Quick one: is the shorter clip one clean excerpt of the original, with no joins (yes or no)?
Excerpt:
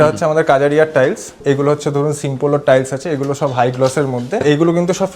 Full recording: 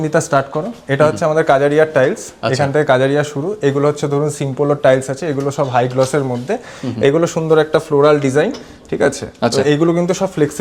no